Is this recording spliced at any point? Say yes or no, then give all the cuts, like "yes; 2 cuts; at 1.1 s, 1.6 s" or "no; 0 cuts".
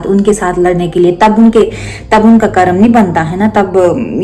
no; 0 cuts